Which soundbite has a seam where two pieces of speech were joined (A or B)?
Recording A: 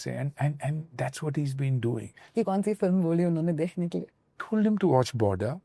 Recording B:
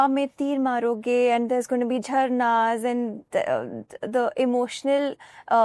A